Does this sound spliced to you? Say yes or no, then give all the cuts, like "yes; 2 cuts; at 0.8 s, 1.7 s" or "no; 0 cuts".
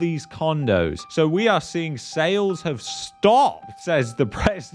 yes; 1 cut; at 1.0 s